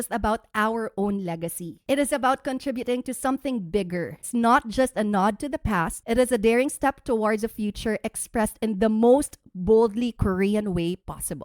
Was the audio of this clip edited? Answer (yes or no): yes